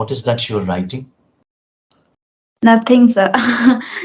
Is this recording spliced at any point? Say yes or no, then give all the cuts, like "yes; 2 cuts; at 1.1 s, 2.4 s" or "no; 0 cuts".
no; 0 cuts